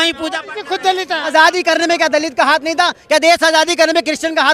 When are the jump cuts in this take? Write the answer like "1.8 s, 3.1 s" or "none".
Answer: 1.3 s